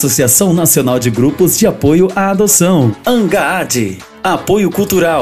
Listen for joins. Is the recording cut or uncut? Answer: uncut